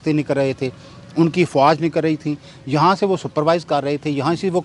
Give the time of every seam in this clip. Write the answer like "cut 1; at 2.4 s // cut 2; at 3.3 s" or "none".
none